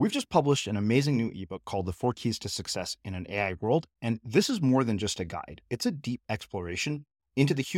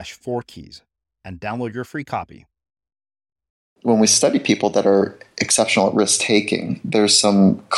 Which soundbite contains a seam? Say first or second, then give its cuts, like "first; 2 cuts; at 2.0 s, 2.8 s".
second; 1 cut; at 3.9 s